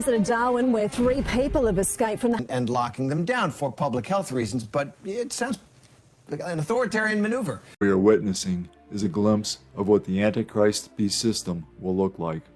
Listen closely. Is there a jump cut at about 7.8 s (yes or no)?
yes